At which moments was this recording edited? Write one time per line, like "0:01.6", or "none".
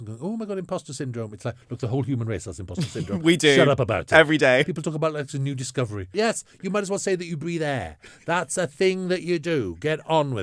0:04.6
0:06.1